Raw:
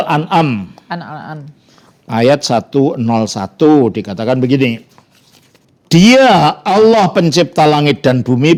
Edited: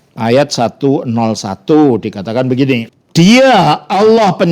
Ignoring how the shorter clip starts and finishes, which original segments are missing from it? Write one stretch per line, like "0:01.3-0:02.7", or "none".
0:04.9-0:05.7